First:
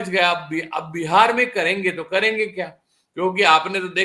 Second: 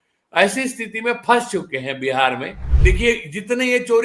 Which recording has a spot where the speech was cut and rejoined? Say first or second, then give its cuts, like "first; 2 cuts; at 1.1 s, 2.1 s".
second; 1 cut; at 2.7 s